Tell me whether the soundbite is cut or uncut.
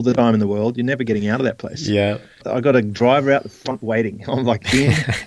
cut